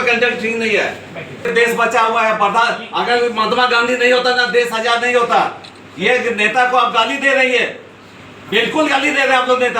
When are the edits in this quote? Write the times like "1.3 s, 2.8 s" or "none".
1.5 s